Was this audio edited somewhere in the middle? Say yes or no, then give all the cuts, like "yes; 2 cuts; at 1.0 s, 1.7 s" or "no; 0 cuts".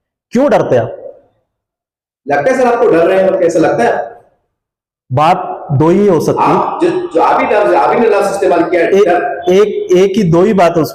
no; 0 cuts